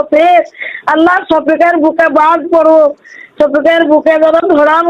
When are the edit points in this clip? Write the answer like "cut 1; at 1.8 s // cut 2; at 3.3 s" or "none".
none